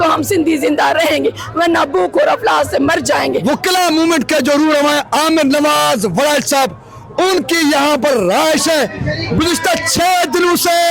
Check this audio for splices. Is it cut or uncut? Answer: cut